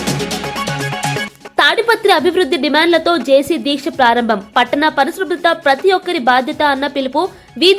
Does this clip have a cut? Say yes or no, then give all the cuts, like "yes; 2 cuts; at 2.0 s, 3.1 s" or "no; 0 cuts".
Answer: yes; 1 cut; at 1.3 s